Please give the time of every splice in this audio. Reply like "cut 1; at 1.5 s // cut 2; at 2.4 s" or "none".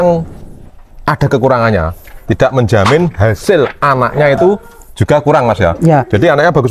none